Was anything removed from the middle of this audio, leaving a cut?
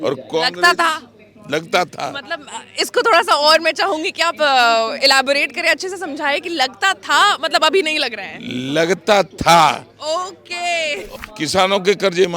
yes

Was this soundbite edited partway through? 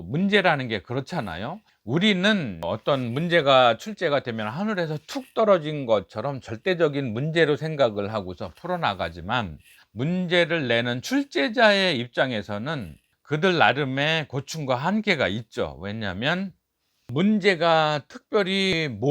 yes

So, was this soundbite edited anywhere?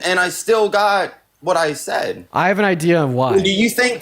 yes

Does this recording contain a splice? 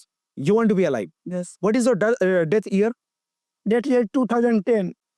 no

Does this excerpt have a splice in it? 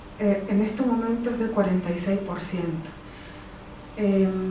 yes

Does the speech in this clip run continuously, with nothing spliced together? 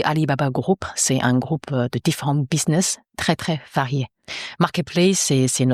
yes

